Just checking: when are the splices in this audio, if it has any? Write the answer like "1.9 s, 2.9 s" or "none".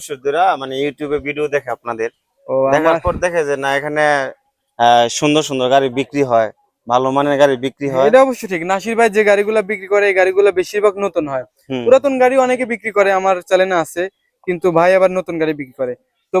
none